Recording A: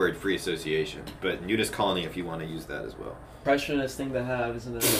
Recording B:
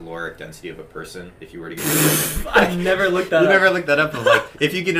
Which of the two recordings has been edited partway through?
A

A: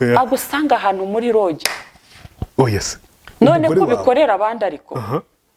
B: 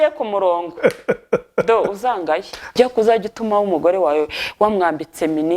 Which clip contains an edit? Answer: B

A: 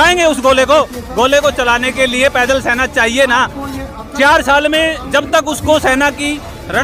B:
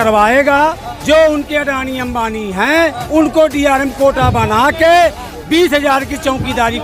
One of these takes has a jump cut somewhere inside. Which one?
B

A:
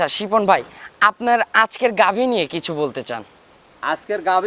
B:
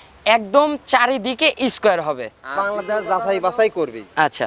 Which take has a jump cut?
B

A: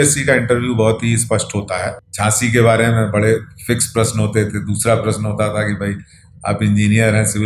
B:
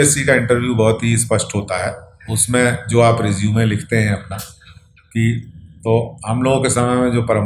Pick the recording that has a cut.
A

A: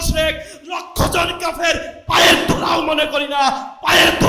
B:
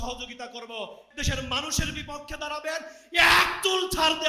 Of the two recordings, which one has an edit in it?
B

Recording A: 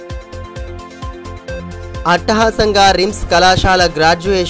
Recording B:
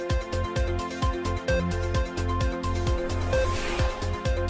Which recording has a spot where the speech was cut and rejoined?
A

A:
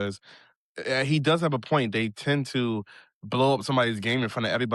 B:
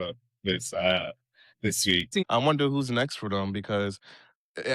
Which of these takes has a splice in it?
B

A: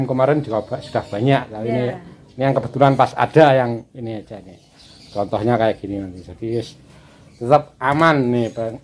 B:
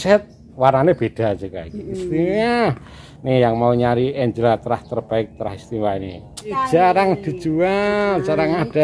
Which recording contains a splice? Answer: B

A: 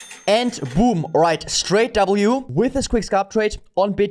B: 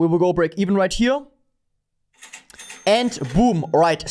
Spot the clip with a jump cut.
A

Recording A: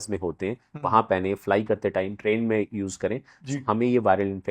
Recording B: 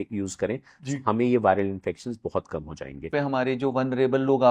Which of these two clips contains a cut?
B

